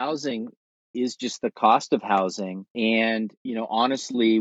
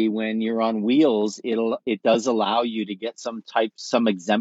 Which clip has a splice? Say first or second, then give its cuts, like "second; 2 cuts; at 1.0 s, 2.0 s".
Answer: first; 2 cuts; at 2.6 s, 3.4 s